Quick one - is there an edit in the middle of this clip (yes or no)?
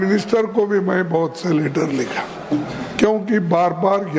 no